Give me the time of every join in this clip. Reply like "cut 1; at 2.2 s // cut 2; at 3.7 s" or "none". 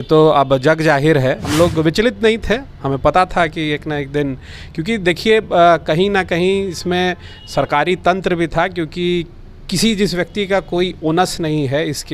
cut 1; at 1.4 s